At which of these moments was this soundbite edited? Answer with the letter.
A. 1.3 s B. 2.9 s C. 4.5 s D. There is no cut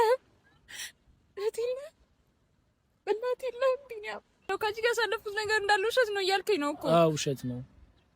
C